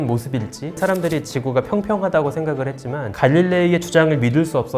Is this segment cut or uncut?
cut